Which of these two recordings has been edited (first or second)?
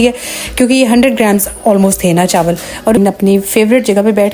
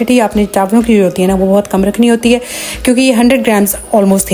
first